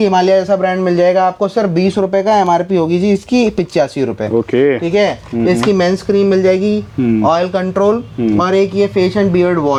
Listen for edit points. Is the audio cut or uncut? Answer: uncut